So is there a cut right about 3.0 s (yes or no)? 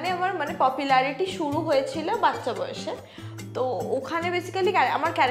no